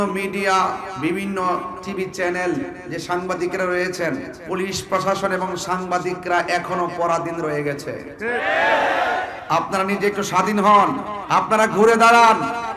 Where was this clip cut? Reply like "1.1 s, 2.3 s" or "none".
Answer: 0.9 s, 1.8 s, 4.3 s, 9.4 s, 11.1 s